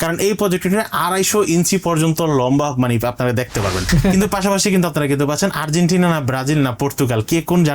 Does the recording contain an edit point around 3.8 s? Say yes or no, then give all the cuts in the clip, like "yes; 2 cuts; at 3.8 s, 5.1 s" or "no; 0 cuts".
yes; 1 cut; at 3.8 s